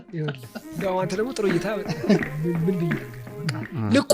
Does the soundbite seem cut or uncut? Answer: cut